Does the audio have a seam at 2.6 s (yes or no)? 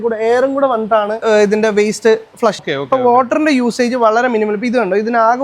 yes